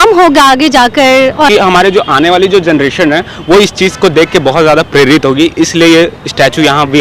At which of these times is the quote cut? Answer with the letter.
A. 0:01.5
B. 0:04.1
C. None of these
A